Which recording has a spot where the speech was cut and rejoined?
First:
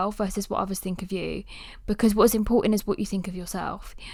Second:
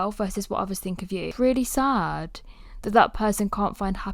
second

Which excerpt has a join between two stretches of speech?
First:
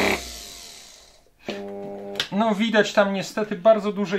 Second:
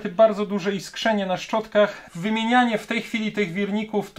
second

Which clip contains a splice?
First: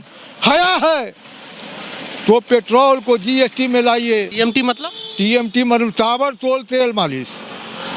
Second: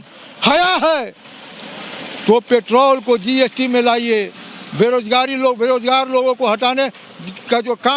first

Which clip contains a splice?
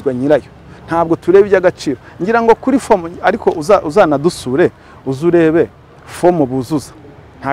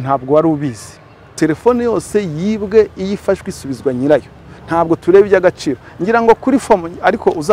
second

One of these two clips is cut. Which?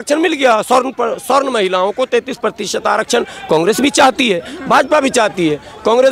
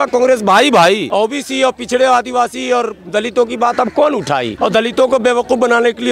second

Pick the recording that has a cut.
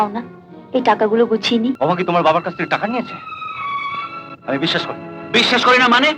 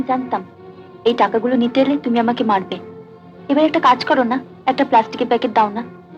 first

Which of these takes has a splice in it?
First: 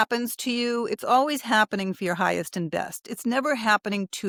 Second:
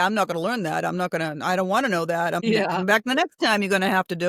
second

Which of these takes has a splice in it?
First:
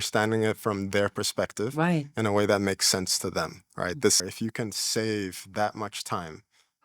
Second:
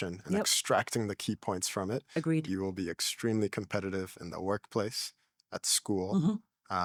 first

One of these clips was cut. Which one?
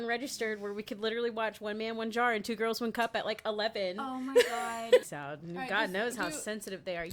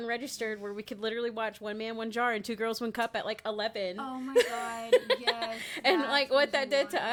first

